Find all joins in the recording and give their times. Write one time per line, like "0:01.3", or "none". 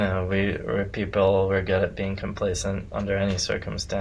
none

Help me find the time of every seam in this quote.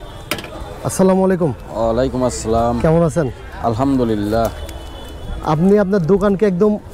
none

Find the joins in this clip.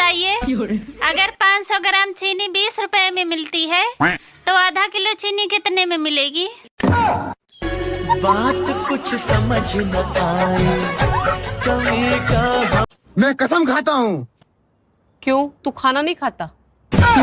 0:13.0

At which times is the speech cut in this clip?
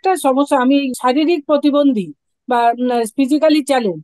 0:00.9

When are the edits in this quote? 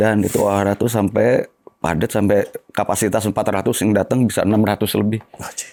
none

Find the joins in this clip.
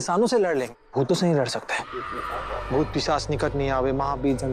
0:02.6

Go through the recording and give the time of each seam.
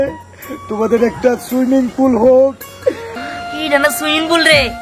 0:03.1

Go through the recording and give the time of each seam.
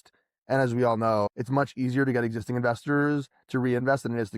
0:01.3

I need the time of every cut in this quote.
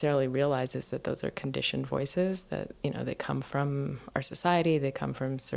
none

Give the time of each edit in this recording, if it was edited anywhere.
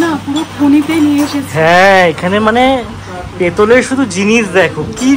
none

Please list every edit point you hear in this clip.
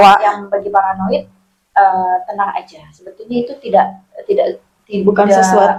none

